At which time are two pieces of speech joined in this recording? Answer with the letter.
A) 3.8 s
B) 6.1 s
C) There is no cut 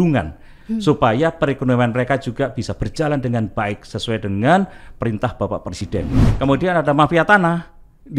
B